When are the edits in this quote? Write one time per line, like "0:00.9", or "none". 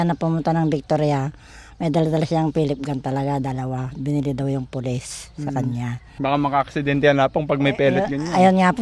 0:06.1